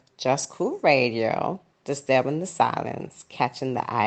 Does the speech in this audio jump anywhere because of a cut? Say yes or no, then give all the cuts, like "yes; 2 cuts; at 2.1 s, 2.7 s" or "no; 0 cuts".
no; 0 cuts